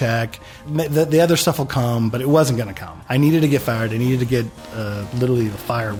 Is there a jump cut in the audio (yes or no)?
no